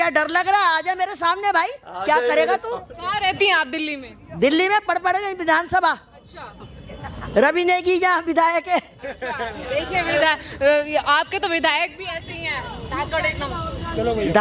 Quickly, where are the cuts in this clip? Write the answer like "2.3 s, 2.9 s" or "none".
none